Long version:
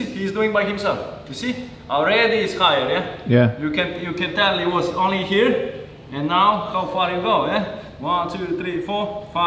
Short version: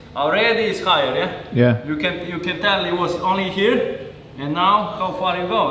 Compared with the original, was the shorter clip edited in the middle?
no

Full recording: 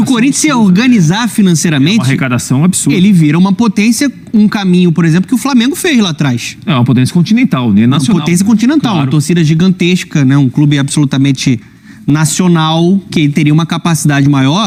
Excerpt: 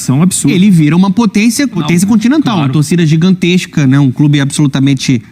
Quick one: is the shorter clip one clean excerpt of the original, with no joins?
no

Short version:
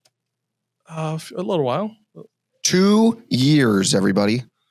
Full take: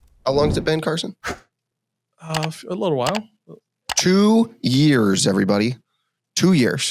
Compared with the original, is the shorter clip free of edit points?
yes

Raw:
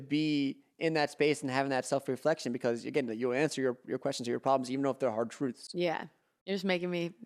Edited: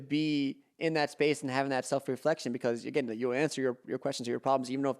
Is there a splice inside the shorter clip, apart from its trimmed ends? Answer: no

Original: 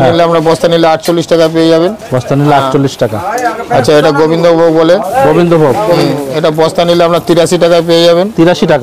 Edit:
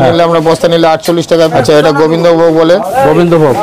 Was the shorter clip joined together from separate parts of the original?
yes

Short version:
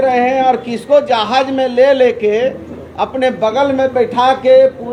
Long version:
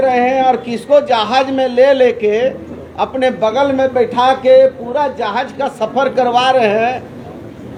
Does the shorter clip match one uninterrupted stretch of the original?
yes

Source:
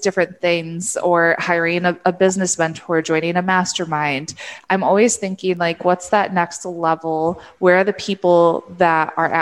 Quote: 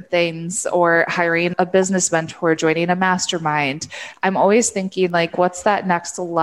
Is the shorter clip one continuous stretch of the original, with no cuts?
no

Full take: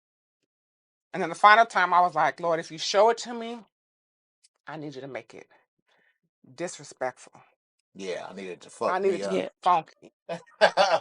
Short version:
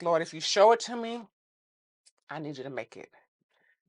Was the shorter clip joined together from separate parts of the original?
no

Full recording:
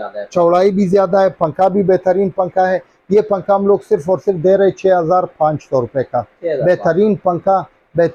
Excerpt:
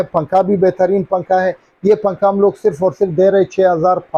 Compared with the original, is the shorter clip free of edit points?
yes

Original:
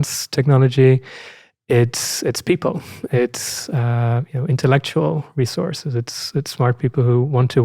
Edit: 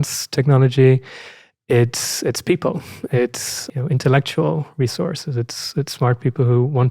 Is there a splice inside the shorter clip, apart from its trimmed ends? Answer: yes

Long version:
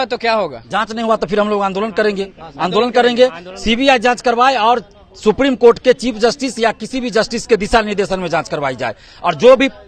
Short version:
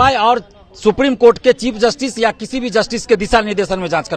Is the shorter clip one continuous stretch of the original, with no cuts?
yes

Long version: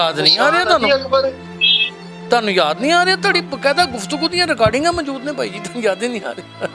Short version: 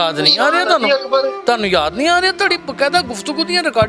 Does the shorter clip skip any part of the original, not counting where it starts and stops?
yes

